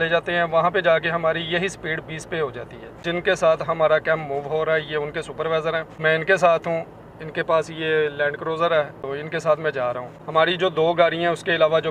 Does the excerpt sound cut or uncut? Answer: uncut